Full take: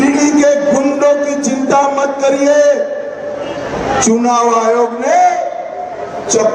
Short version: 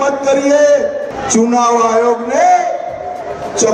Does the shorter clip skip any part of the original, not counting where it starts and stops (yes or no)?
yes